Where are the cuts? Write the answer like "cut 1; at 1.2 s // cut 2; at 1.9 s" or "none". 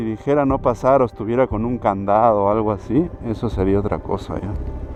none

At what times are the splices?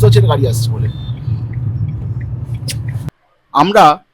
cut 1; at 3.1 s

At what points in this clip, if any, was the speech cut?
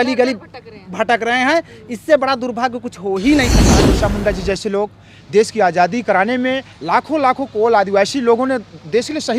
cut 1; at 3.6 s

